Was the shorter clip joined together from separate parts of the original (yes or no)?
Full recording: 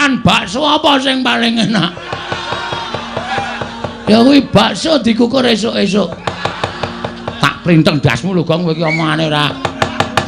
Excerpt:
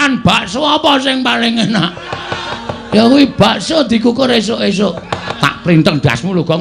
yes